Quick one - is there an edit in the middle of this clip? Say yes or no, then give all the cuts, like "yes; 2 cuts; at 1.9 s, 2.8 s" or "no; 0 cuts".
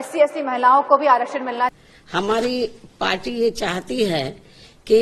yes; 1 cut; at 1.7 s